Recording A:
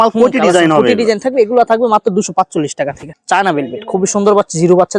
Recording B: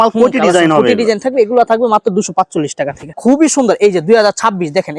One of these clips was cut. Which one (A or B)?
B